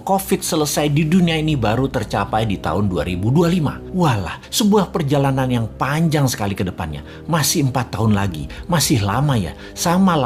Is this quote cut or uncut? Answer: uncut